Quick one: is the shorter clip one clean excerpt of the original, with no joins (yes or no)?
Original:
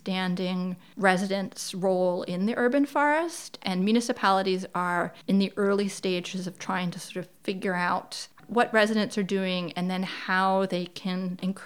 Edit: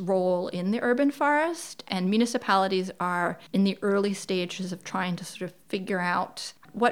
yes